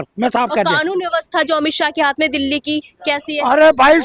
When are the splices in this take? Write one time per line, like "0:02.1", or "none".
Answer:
none